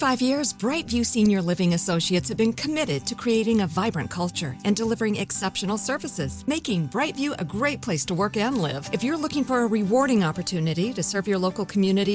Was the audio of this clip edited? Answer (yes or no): no